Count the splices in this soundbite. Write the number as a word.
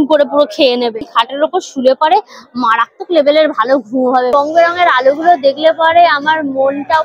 two